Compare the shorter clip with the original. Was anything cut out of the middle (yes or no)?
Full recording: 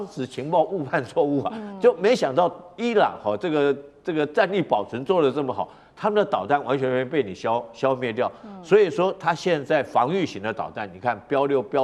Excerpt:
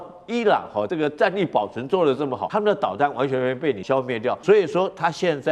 yes